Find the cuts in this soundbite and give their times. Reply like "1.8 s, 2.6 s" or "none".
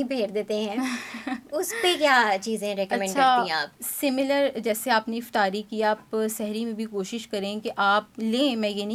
none